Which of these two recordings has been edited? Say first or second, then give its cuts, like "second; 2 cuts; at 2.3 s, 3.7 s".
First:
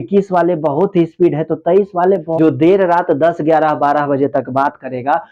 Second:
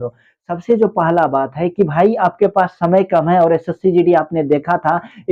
first; 1 cut; at 2.3 s